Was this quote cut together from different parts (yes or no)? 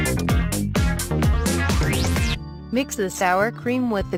no